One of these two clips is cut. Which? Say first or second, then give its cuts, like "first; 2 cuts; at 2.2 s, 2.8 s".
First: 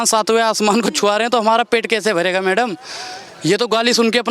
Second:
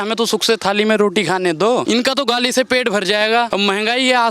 second; 2 cuts; at 1.8 s, 3.5 s